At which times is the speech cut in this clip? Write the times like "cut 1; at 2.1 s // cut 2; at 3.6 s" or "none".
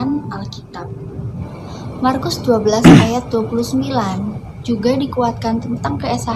cut 1; at 1.4 s

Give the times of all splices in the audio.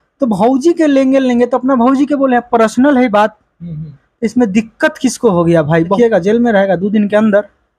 cut 1; at 6.0 s

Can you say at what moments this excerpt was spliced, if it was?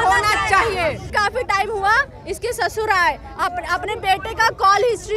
cut 1; at 1.1 s

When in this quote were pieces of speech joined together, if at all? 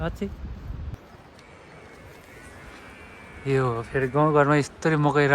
cut 1; at 1.0 s

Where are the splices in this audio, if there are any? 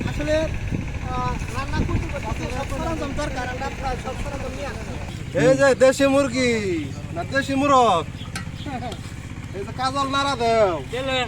cut 1; at 5.1 s

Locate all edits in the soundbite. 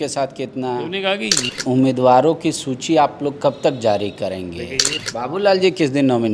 cut 1; at 1.4 s // cut 2; at 5.0 s

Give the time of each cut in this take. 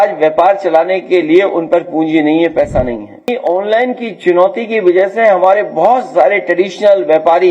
cut 1; at 3.3 s

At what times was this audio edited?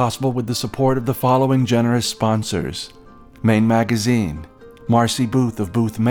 none

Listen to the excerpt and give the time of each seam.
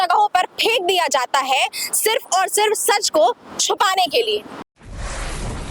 cut 1; at 4.6 s

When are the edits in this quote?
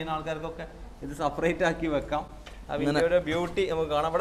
none

